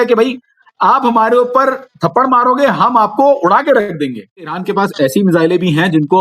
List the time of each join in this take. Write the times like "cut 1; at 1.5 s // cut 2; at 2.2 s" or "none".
cut 1; at 4.6 s